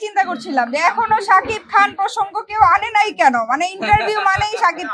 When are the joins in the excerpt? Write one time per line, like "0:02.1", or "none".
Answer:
none